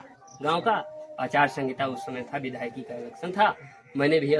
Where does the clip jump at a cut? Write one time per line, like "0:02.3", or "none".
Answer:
none